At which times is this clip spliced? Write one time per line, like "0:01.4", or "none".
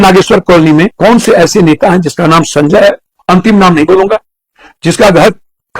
0:00.9